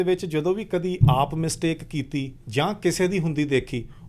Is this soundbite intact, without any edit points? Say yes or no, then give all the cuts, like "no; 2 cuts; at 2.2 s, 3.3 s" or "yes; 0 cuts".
yes; 0 cuts